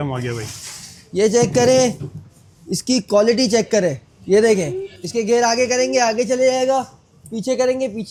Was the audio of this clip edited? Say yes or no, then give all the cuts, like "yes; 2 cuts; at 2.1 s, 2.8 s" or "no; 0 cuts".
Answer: no; 0 cuts